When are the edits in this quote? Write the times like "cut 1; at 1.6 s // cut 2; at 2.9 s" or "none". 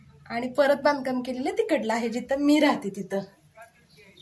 none